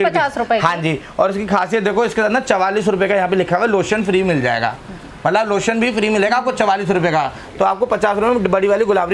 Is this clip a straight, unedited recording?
yes; 0 cuts

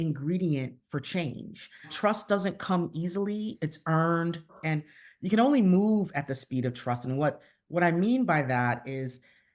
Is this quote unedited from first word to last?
no; 3 cuts; at 1.9 s, 3.5 s, 4.6 s

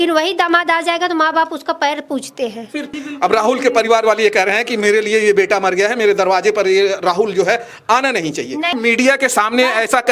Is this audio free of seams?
no; 2 cuts; at 3.0 s, 8.7 s

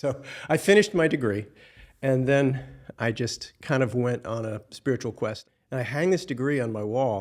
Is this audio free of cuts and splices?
no; 1 cut; at 5.4 s

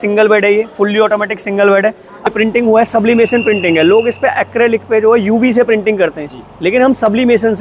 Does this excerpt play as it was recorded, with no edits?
no; 1 cut; at 2.3 s

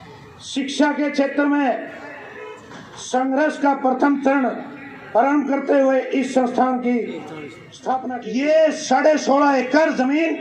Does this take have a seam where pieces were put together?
yes; 1 cut; at 8.1 s

